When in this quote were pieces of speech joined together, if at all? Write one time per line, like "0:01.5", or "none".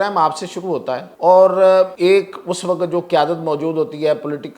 0:01.1
0:01.9